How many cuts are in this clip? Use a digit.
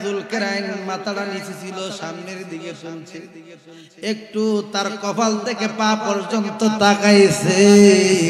0